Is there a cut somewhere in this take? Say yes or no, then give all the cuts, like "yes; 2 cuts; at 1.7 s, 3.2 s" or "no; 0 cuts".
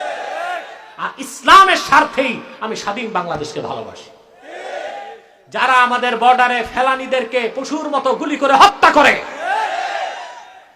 yes; 1 cut; at 5.3 s